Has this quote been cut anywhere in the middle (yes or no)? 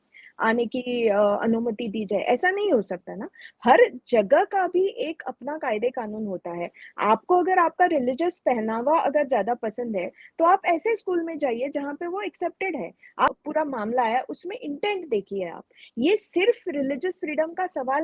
yes